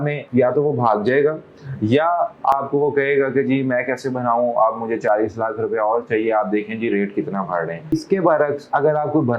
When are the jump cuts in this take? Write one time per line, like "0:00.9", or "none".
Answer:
0:07.9